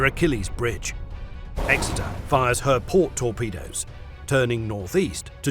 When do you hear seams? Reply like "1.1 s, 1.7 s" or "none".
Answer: 1.3 s